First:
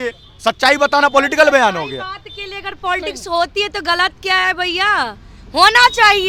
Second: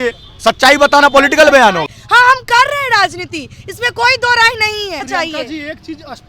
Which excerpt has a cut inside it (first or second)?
second